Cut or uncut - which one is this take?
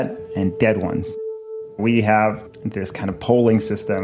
cut